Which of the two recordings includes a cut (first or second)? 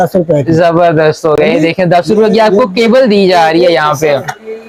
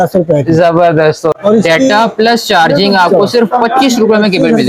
second